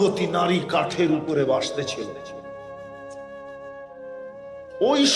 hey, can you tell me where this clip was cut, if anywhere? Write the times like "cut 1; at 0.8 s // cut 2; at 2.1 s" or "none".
cut 1; at 2.2 s // cut 2; at 4.2 s